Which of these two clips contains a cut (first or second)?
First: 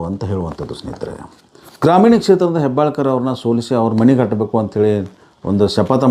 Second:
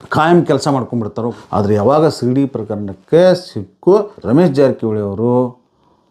second